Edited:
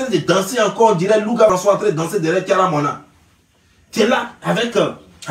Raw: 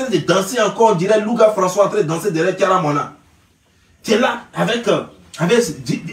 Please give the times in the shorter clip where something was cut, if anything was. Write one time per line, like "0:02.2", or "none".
0:01.5